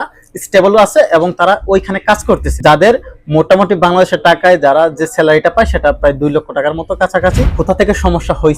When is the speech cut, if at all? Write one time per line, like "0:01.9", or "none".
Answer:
0:02.5
0:07.5

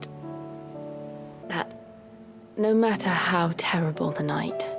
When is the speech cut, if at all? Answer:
0:01.4

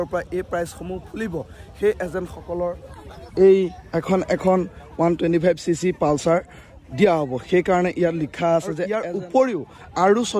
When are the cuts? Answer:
0:09.0

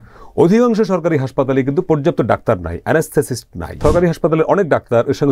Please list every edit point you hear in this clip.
0:03.8

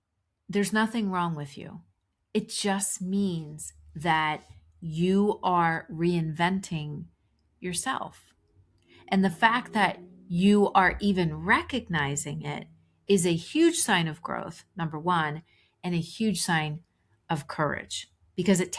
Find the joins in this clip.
none

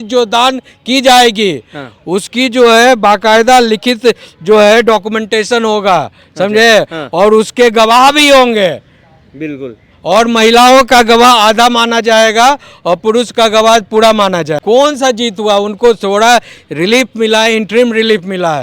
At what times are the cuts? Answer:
0:14.6

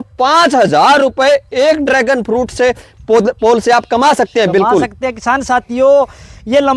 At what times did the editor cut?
none

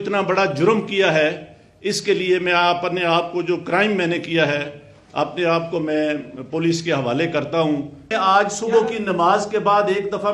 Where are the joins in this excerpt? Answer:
0:08.1

